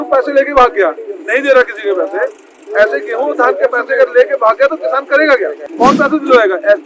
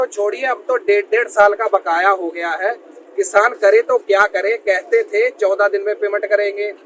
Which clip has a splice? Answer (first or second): first